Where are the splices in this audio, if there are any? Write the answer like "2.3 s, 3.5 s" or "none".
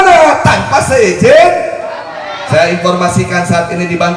2.3 s